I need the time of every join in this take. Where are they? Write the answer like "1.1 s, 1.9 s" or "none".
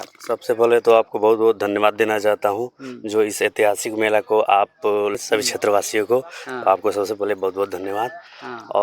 5.0 s